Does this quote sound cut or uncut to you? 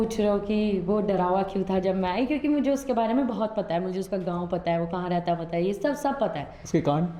uncut